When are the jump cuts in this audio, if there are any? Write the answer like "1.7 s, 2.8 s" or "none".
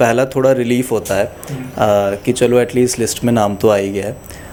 none